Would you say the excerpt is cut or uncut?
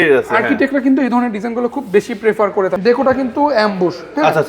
cut